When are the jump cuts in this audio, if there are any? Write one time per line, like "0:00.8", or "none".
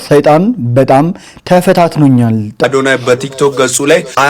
0:02.6